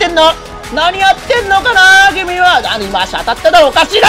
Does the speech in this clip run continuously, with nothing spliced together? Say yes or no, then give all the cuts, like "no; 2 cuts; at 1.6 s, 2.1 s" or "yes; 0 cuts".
yes; 0 cuts